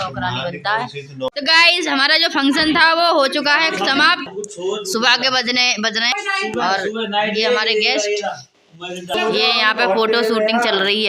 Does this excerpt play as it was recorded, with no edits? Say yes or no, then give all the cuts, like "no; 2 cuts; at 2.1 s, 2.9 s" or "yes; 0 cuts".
no; 4 cuts; at 1.3 s, 4.3 s, 6.1 s, 9.1 s